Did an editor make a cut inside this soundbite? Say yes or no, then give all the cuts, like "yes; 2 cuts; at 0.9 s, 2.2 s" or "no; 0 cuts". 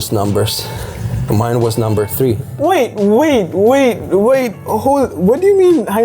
yes; 1 cut; at 2.5 s